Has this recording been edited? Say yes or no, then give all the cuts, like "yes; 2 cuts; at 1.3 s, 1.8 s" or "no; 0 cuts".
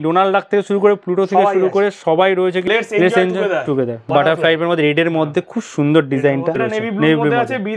yes; 3 cuts; at 2.6 s, 4.1 s, 6.6 s